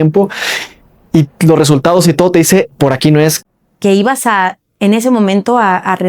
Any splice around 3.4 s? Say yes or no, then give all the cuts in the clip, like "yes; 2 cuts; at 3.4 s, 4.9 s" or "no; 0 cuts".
yes; 1 cut; at 3.4 s